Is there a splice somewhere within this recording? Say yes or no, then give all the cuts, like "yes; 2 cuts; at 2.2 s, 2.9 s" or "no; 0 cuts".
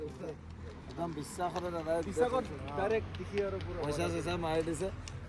no; 0 cuts